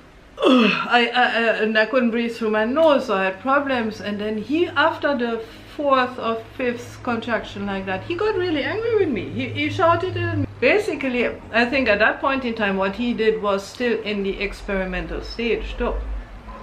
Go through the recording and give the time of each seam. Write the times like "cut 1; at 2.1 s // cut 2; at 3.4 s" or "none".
cut 1; at 10.4 s